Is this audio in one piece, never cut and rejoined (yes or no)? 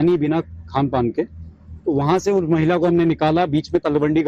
no